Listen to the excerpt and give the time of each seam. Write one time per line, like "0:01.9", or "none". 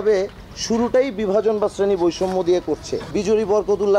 0:03.0